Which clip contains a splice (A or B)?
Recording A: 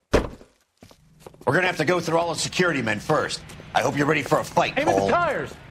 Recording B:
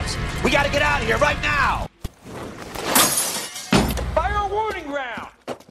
B